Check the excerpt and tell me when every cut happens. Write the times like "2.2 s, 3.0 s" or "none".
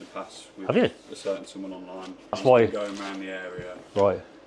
2.4 s